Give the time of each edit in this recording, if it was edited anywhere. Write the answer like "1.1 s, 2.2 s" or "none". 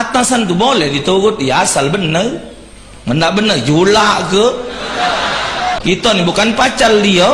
5.8 s